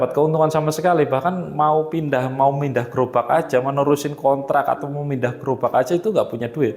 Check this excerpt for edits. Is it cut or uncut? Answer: uncut